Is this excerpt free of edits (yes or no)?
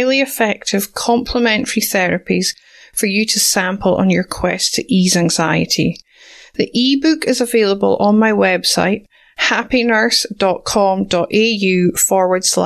yes